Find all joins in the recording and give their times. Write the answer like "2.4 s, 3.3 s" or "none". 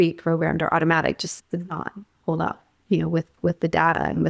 1.3 s

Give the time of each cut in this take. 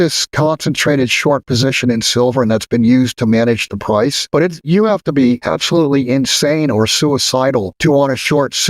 4.2 s, 5.4 s, 7.7 s

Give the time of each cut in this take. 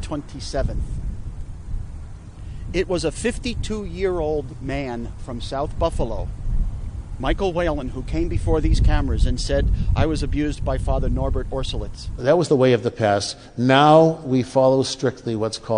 12.2 s

